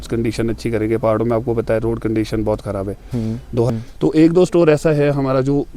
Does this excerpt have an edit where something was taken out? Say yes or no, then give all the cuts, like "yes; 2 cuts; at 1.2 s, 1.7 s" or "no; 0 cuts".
yes; 1 cut; at 3.7 s